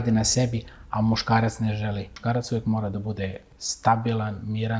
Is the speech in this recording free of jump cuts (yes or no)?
no